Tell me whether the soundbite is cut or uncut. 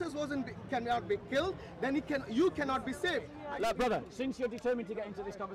cut